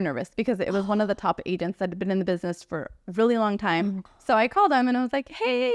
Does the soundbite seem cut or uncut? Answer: cut